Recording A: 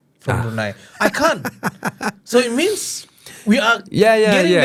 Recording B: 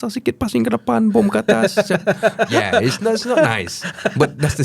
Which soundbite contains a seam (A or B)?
B